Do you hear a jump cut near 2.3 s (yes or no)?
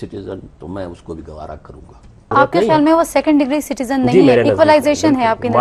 yes